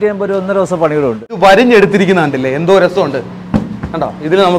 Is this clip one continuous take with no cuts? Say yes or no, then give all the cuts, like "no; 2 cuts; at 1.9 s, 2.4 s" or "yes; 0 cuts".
no; 1 cut; at 1.4 s